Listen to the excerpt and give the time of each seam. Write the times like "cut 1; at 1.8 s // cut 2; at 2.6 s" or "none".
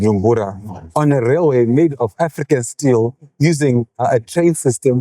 cut 1; at 4.0 s

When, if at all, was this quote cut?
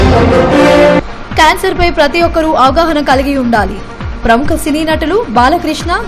cut 1; at 1.0 s

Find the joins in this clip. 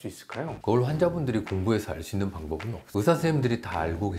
cut 1; at 2.9 s

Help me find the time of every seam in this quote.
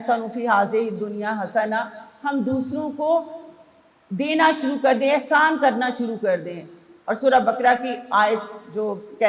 none

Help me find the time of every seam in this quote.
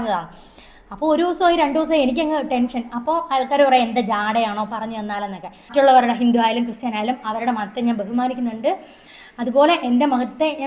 cut 1; at 5.7 s

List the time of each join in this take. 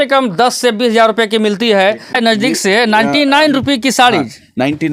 cut 1; at 2.2 s

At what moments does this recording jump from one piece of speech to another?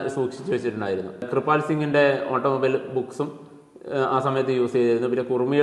cut 1; at 1.3 s

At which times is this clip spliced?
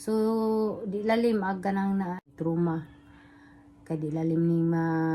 cut 1; at 2.1 s

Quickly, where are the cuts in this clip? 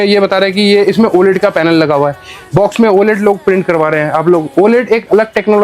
none

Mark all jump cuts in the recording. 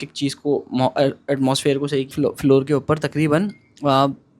cut 1; at 2.1 s

